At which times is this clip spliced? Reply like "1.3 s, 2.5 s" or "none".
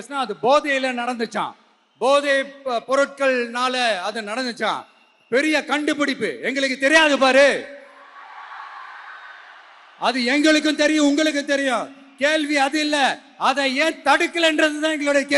none